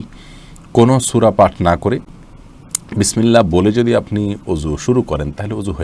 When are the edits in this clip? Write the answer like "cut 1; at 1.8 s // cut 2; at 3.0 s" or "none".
none